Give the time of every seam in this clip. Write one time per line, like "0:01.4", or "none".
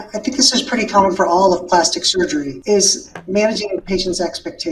0:02.5